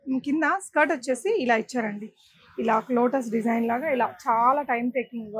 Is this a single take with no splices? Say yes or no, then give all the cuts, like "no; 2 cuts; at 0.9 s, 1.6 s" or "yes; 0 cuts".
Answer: yes; 0 cuts